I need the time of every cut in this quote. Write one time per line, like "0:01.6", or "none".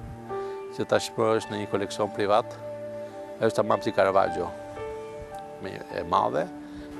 none

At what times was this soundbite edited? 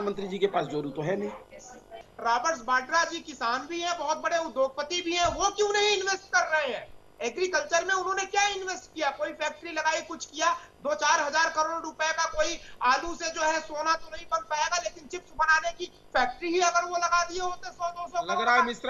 0:02.1

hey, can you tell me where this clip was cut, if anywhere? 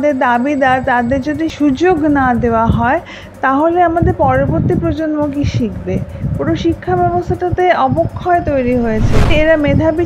0:01.5
0:09.3

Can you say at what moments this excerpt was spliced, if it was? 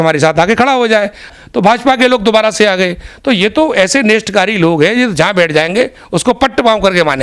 0:01.3

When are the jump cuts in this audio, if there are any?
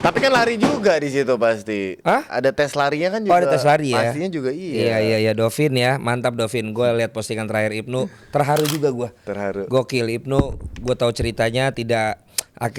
none

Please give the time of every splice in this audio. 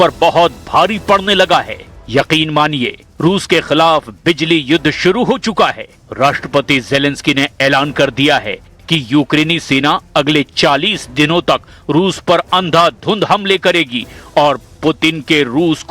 0:10.0

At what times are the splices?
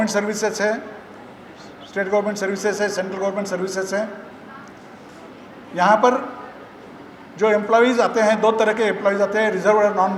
none

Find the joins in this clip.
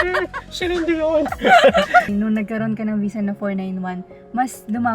0:02.1

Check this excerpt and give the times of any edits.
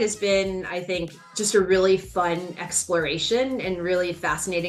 none

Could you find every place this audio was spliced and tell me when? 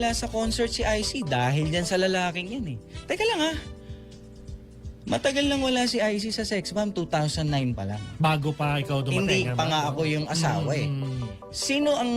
0:01.1

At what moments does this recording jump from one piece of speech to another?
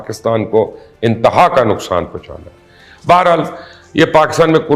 none

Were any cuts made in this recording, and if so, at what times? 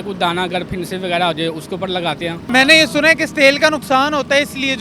0:02.5

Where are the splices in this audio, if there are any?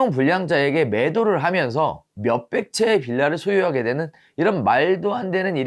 0:02.1

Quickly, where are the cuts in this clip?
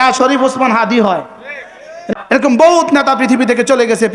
0:01.9

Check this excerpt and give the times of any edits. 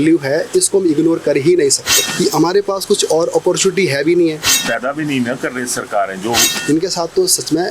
0:02.0
0:04.5
0:06.5

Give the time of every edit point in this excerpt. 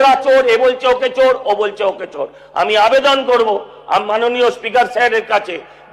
none

